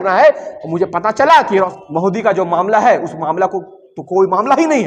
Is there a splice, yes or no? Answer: yes